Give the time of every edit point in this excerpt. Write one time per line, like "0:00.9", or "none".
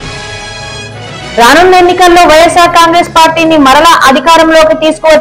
0:01.1